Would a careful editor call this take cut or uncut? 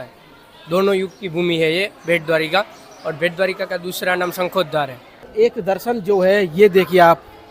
cut